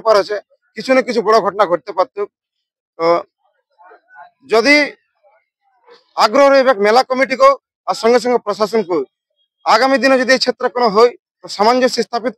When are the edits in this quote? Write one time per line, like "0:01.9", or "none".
none